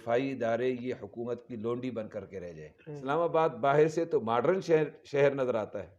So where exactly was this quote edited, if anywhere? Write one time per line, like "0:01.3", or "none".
0:02.9